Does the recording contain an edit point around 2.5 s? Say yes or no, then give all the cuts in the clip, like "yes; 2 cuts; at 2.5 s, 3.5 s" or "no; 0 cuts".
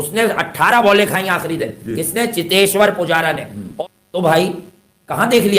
no; 1 cut; at 3.7 s